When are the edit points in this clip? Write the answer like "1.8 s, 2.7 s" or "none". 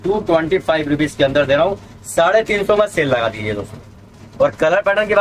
none